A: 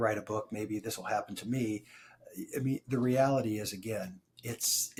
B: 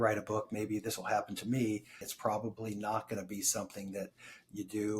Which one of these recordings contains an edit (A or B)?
B